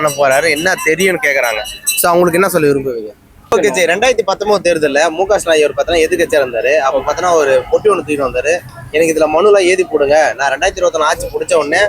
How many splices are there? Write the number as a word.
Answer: one